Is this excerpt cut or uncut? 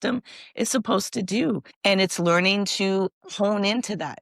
cut